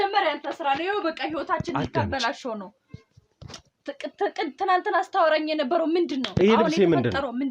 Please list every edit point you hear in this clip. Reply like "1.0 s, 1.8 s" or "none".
none